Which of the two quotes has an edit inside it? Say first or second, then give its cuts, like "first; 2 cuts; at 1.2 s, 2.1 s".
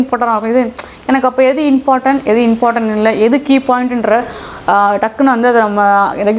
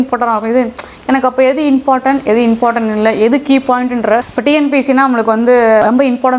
second; 1 cut; at 4.3 s